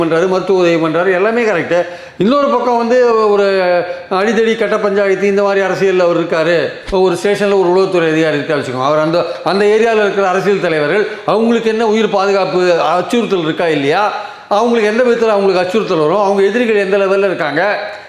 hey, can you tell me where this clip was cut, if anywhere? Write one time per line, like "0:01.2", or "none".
0:06.8